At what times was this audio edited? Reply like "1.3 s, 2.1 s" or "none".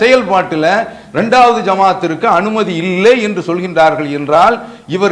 none